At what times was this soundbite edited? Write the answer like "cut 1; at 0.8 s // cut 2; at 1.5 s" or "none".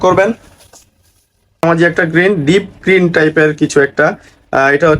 cut 1; at 1.6 s